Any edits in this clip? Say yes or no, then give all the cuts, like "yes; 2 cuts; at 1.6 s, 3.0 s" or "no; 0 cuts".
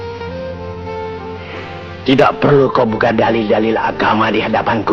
no; 0 cuts